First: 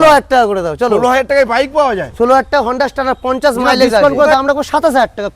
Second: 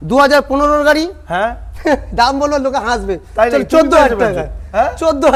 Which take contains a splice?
first; 1 cut; at 4.0 s

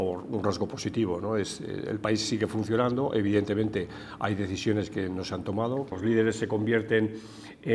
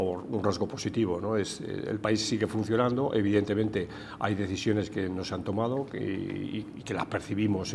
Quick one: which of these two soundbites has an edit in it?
first; 1 cut; at 6.0 s

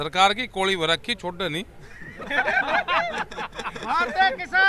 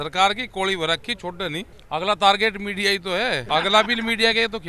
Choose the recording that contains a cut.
second; 2 cuts; at 1.8 s, 3.4 s

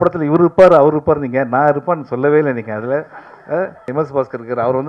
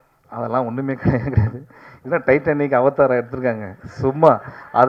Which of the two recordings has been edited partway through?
first; 1 cut; at 3.9 s

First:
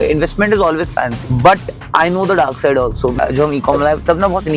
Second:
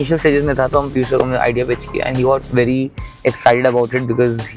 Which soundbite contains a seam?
first; 2 cuts; at 1.2 s, 3.2 s

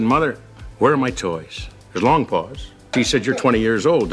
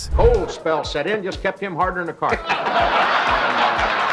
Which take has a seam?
second; 1 cut; at 3.1 s

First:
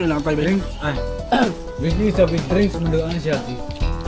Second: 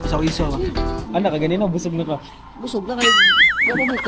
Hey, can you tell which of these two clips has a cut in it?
second; 1 cut; at 1.0 s

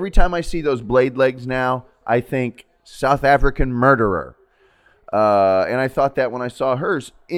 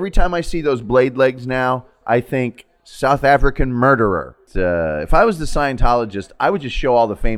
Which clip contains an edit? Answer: second; 1 cut; at 4.4 s

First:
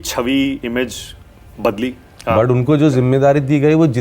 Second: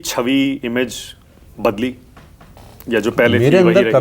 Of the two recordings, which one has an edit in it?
first; 1 cut; at 2.1 s

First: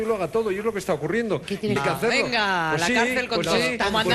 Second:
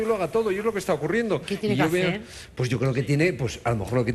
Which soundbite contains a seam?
second; 1 cut; at 1.8 s

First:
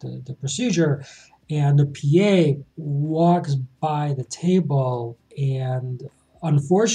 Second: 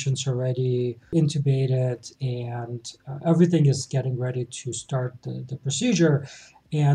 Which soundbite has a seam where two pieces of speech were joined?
second; 1 cut; at 1.0 s

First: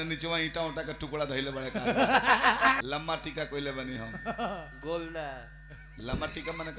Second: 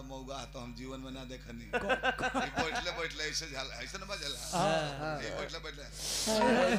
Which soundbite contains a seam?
first; 1 cut; at 2.8 s

